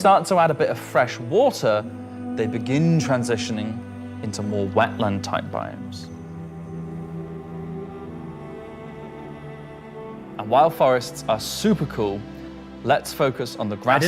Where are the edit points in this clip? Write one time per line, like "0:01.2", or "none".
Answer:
0:11.1

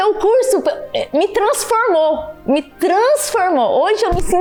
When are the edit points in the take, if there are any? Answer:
none

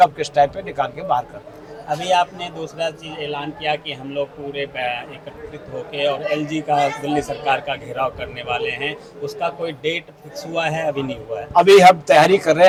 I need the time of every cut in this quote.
none

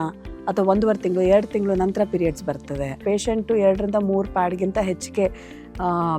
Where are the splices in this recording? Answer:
0:03.0

